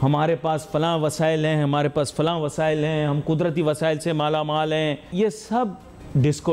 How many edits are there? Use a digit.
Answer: 1